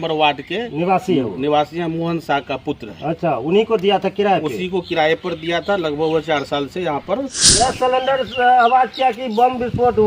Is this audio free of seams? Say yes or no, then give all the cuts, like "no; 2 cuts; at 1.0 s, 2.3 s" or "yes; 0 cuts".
no; 1 cut; at 7.3 s